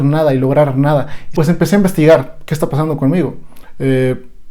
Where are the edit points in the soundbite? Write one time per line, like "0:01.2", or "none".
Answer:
0:01.2